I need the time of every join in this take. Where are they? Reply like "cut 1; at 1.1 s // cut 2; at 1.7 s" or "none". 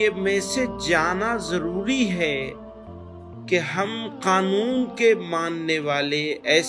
none